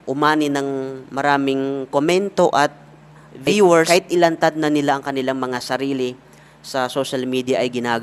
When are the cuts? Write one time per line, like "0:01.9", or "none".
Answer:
0:03.9